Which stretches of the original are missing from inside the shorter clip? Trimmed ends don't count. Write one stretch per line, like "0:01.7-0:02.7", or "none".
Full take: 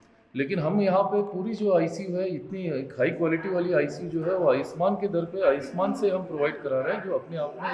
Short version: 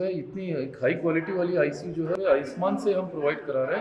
0:04.3-0:05.3